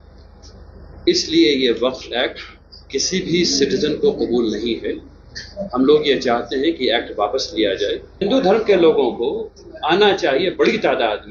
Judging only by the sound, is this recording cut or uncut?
cut